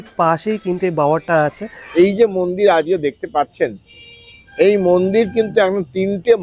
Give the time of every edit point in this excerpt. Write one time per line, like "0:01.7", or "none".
0:01.8